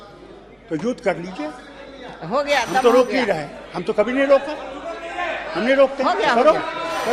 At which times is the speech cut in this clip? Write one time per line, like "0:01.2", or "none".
none